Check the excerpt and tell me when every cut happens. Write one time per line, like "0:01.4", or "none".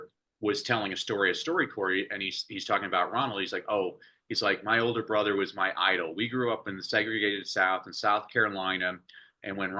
none